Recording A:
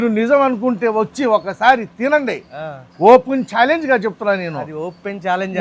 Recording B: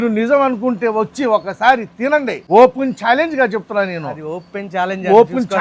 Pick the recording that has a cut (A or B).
B